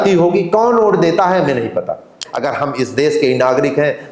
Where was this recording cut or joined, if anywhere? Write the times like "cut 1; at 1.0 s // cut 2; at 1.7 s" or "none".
cut 1; at 2.2 s

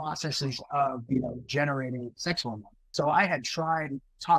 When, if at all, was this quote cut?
cut 1; at 2.7 s

